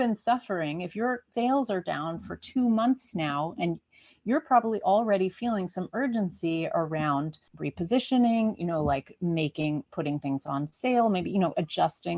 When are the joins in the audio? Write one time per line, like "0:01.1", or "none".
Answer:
0:01.3
0:07.4